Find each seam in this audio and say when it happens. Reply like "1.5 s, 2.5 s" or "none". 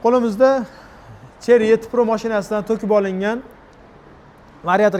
none